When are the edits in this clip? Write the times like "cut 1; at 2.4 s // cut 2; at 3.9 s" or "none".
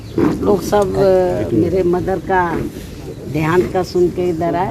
none